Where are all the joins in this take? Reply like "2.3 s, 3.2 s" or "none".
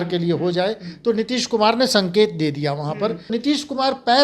3.3 s

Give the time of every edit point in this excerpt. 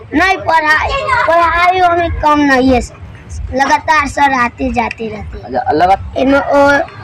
6.0 s

